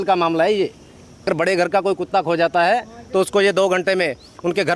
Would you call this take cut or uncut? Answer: cut